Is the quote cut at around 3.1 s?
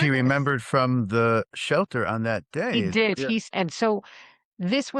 yes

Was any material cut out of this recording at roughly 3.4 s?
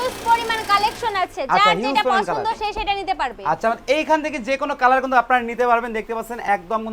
no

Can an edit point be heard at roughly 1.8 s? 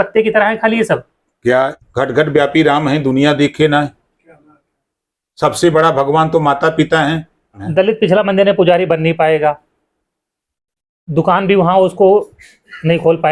yes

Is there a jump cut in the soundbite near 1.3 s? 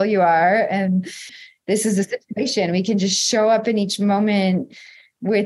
yes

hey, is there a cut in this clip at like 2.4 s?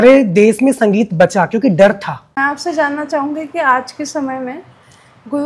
yes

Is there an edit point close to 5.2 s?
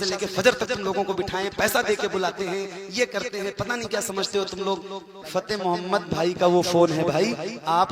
yes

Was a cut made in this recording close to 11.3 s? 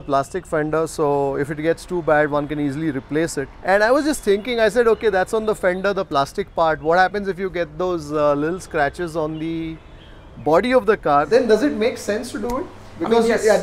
yes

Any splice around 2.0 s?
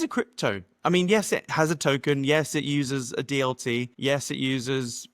no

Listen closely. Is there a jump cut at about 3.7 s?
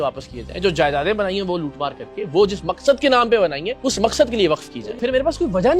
yes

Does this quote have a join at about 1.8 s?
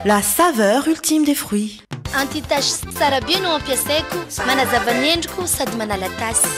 yes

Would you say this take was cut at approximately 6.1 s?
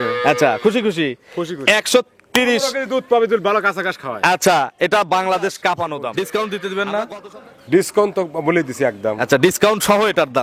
yes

